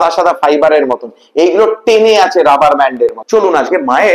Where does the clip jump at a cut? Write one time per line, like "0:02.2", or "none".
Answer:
0:03.2